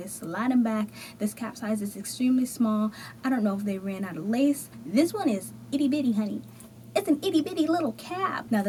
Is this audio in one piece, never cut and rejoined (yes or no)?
yes